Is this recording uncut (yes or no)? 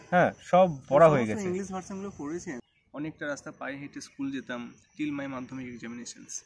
no